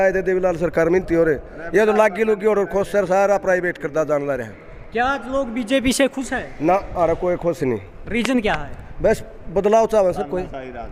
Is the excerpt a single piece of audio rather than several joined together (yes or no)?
yes